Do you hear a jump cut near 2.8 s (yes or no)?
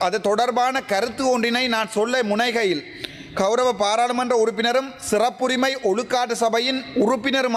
no